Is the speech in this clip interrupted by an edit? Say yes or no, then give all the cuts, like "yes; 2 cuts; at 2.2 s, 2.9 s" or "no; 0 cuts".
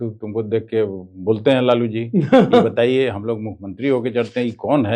no; 0 cuts